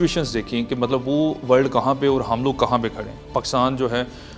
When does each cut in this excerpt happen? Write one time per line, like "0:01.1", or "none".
none